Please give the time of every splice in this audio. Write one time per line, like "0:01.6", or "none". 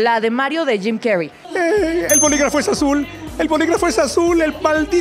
0:01.4